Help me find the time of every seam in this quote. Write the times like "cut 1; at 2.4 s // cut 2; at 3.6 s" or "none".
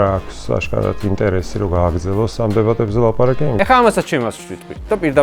cut 1; at 3.6 s